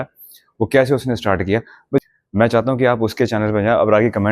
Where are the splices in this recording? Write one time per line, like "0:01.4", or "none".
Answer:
0:02.0